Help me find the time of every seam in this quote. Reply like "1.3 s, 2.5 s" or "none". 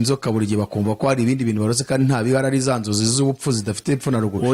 none